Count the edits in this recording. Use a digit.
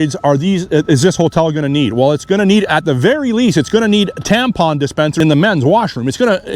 1